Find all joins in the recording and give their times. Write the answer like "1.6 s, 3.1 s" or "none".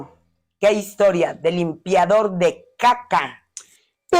none